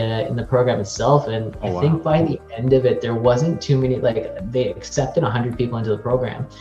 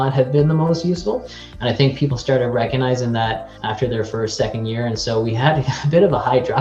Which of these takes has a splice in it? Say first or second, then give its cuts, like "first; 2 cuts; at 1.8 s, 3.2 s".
second; 1 cut; at 3.5 s